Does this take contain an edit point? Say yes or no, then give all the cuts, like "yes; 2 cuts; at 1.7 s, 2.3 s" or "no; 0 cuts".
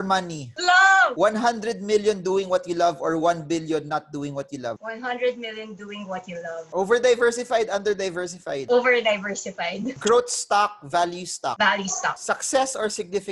yes; 1 cut; at 6.6 s